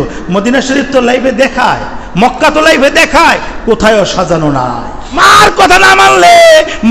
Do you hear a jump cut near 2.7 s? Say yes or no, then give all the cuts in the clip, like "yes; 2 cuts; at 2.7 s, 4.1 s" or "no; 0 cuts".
no; 1 cut; at 5.2 s